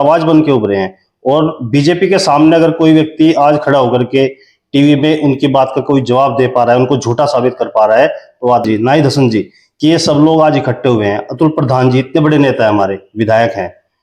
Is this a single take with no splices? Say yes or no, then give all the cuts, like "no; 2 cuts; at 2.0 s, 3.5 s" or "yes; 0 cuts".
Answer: no; 2 cuts; at 8.6 s, 9.6 s